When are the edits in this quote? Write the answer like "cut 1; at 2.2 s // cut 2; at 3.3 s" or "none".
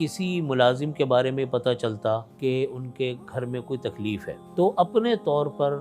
cut 1; at 2.3 s // cut 2; at 4.4 s